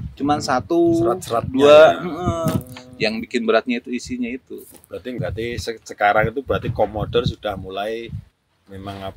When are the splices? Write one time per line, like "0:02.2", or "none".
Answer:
0:05.2

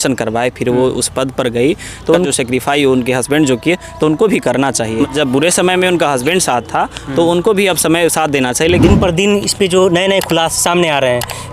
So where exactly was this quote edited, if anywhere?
0:02.3
0:05.1
0:08.8

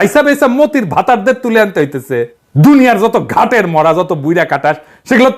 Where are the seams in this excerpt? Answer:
0:02.4

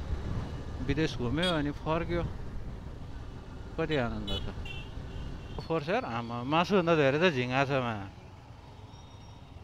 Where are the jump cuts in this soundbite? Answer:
0:05.6

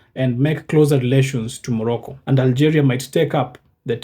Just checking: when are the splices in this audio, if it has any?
0:02.1

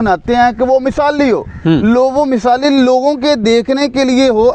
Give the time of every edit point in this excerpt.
none

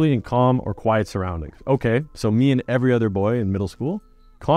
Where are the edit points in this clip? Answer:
none

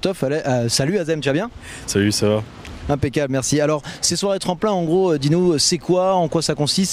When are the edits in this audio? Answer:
0:02.7

